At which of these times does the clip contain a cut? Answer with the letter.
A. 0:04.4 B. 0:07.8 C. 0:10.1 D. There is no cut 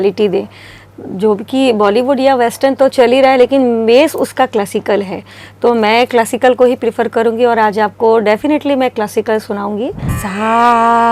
C